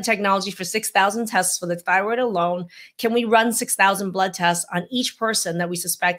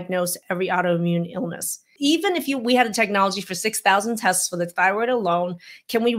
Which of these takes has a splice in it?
second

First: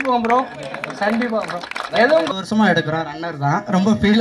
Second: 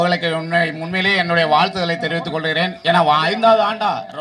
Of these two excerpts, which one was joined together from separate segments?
first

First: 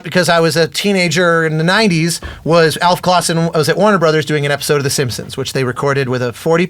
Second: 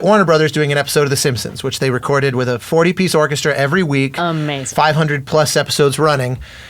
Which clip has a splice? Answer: second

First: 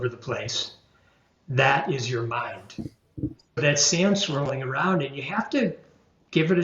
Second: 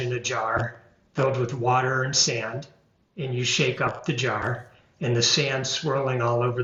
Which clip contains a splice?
first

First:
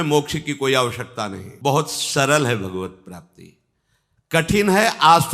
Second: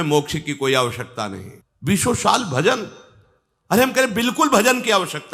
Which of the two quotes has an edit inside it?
second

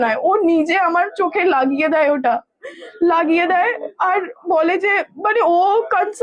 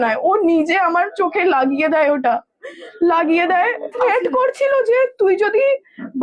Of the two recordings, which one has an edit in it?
second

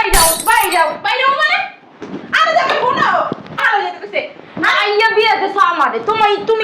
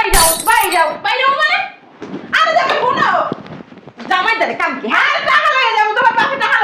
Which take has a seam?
first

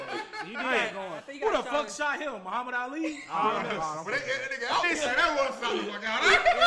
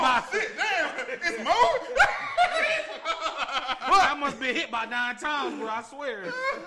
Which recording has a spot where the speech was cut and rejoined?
first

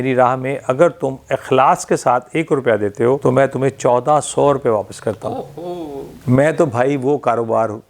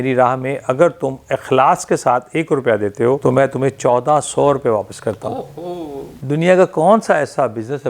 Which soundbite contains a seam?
second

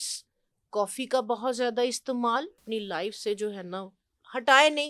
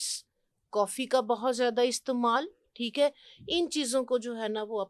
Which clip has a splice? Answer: first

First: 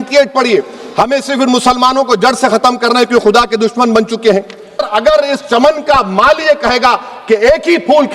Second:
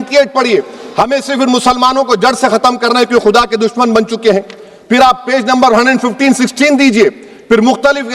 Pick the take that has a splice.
first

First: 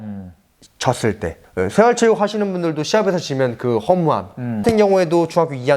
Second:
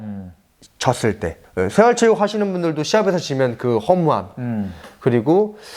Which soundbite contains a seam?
first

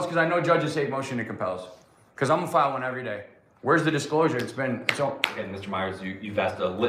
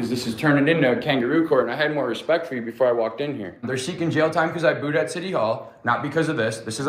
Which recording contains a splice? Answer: second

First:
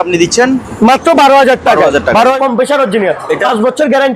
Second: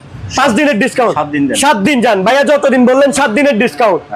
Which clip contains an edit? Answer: first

